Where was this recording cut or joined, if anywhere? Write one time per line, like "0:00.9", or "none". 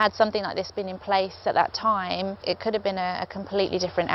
0:02.4